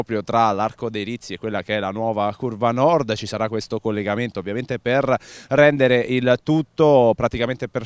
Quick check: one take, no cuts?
no; 1 cut; at 2.6 s

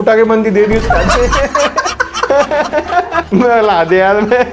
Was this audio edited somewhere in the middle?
yes; 1 cut; at 3.2 s

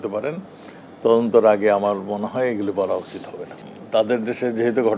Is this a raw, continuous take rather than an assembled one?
no; 1 cut; at 3.6 s

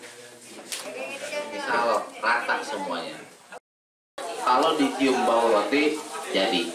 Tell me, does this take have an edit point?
yes; 1 cut; at 4.1 s

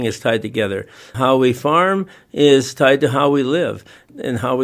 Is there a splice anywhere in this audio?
no; 0 cuts

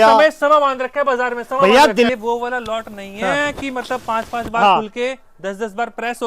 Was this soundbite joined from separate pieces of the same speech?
yes; 1 cut; at 2.1 s

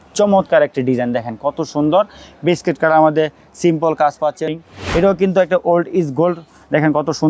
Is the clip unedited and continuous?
no; 1 cut; at 4.5 s

